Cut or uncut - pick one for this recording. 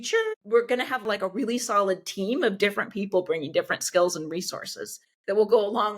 cut